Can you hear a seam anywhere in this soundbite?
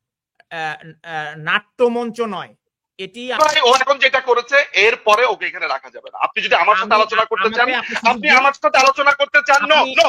yes; 1 cut; at 3.4 s

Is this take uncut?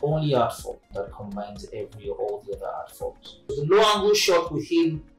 no; 2 cuts; at 0.9 s, 3.4 s

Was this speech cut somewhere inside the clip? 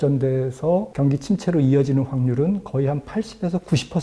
yes; 1 cut; at 0.9 s

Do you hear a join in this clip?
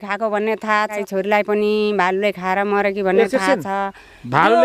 yes; 1 cut; at 0.9 s

